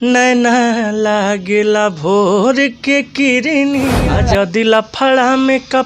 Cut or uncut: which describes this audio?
cut